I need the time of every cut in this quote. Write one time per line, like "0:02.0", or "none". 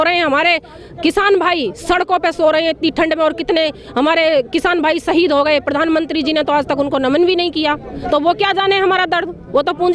none